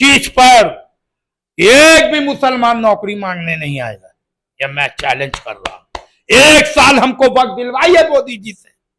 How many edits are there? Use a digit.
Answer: 0